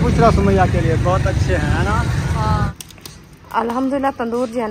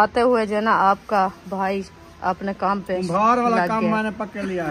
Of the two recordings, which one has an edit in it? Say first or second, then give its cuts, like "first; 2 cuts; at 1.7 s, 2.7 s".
first; 1 cut; at 2.7 s